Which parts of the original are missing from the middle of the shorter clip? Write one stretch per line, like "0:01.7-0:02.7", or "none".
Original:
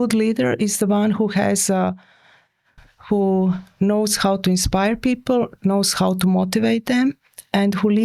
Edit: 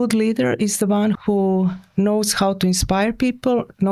0:01.2-0:03.0